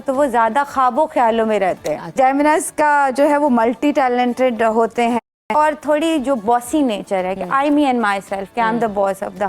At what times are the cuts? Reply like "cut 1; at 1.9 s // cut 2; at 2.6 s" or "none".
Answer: cut 1; at 2.1 s // cut 2; at 5.5 s